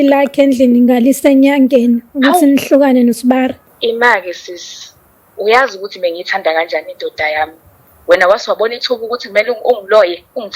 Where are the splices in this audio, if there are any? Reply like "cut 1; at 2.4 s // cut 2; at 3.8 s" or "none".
cut 1; at 3.7 s // cut 2; at 7.9 s